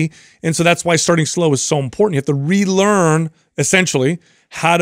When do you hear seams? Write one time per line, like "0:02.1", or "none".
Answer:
none